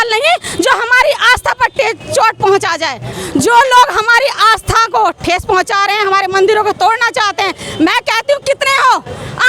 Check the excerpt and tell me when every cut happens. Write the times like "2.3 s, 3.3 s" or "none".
3.1 s